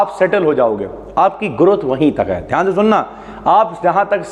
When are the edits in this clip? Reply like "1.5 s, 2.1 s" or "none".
none